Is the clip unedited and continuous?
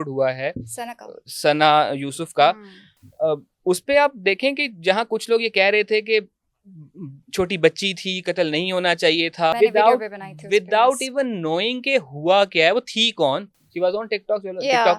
no; 2 cuts; at 9.5 s, 13.6 s

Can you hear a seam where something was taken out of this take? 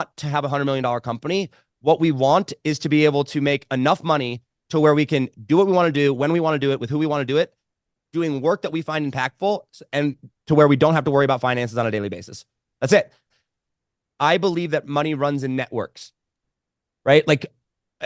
yes; 1 cut; at 13.2 s

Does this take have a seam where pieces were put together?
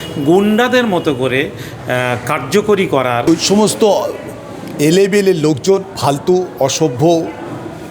yes; 1 cut; at 3.2 s

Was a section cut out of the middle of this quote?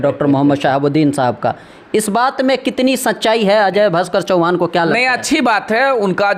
no; 0 cuts

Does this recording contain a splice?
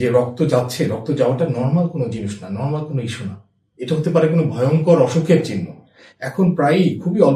no; 0 cuts

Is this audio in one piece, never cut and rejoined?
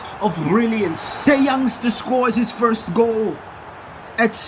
no; 1 cut; at 1.1 s

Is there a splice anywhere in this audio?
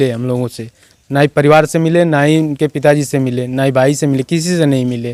no; 0 cuts

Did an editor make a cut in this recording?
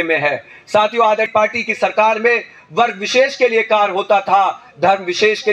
yes; 1 cut; at 1.3 s

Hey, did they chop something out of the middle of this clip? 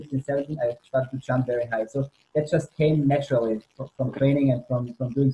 no; 0 cuts

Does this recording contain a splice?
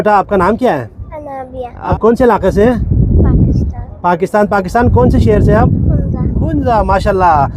yes; 1 cut; at 1.9 s

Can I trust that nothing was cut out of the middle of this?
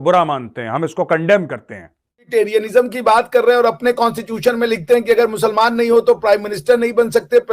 no; 1 cut; at 2.2 s

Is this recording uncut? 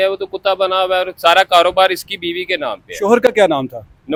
yes; 0 cuts

